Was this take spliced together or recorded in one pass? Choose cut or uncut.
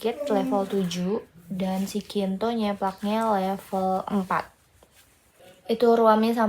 cut